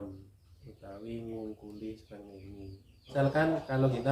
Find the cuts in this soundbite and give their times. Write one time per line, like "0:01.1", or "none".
0:03.1